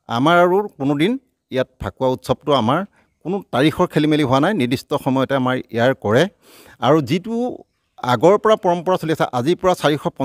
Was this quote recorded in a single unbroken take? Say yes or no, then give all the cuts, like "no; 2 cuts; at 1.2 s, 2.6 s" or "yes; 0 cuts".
yes; 0 cuts